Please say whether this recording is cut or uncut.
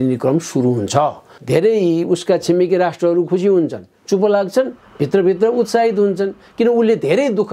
cut